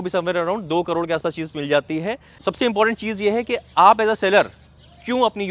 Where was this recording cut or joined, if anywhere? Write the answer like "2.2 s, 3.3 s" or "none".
2.4 s